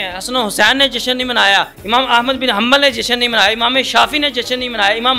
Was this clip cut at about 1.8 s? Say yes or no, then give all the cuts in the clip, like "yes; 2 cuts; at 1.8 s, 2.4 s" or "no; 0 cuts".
yes; 1 cut; at 1.8 s